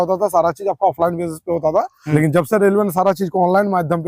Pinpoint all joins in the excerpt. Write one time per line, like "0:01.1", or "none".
0:02.0